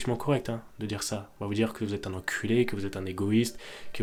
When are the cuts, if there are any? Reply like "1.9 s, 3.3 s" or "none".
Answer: none

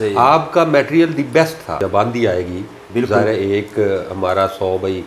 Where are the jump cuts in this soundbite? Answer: 1.8 s

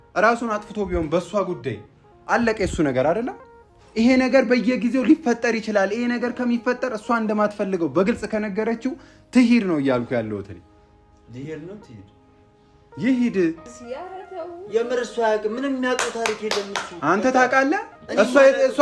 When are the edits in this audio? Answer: 13.7 s

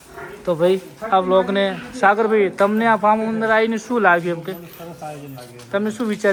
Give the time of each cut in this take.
none

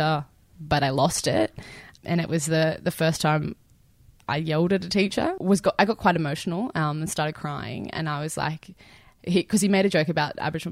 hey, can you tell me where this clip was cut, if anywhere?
1.8 s, 5.4 s

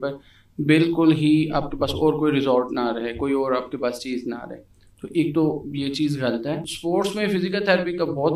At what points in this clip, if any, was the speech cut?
6.7 s

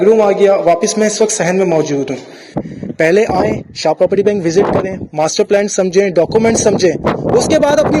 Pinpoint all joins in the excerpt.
2.6 s

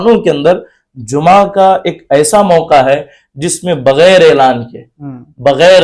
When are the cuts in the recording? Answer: none

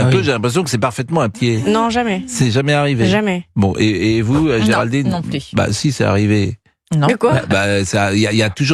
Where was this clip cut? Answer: 1.3 s

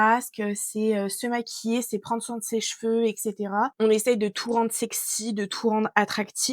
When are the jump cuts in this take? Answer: 3.7 s

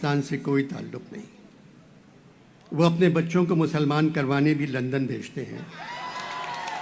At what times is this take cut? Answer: none

